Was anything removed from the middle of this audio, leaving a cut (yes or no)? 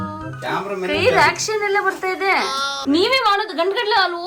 yes